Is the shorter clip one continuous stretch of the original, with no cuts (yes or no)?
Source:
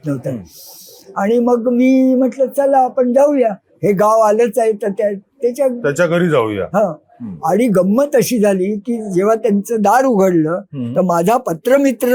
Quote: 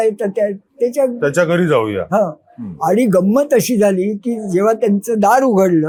yes